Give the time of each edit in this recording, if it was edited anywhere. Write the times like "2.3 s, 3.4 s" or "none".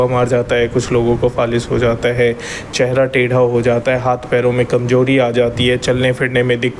none